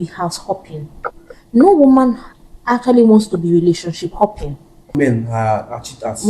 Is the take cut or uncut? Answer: cut